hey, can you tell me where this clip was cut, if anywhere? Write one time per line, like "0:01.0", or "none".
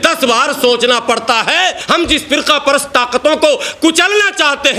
0:01.8